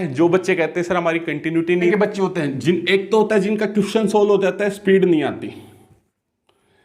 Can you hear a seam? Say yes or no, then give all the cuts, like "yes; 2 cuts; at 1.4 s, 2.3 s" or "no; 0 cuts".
yes; 1 cut; at 1.9 s